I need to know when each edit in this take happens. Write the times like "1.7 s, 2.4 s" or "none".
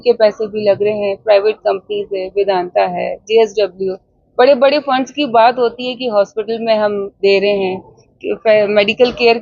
none